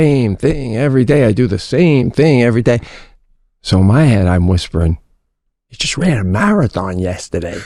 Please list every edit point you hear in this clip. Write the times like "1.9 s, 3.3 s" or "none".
none

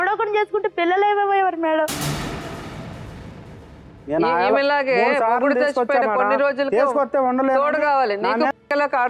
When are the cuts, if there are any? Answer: 1.9 s, 3.9 s

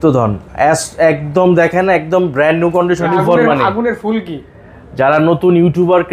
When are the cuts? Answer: 3.1 s

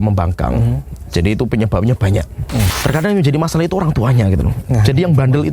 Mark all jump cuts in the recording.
2.7 s

